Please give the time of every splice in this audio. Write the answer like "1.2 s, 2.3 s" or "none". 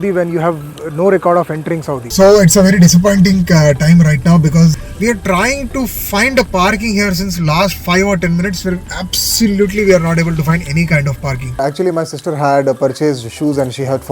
2.1 s, 4.8 s, 11.6 s